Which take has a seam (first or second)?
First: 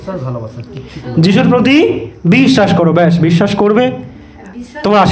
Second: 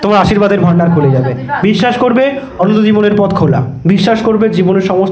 second